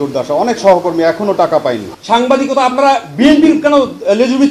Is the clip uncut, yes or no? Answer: no